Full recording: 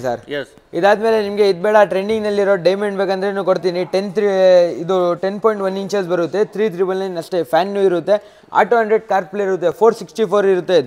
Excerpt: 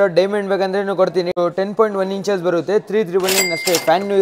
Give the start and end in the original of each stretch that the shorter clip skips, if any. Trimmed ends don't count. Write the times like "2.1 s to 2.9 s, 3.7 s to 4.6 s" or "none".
3.9 s to 5.0 s